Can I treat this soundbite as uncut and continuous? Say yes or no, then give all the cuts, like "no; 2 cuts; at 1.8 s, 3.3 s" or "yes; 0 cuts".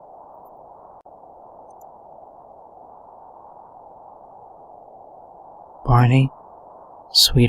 no; 3 cuts; at 1.0 s, 4.5 s, 5.8 s